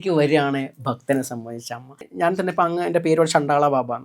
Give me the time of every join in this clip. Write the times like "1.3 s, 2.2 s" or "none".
2.1 s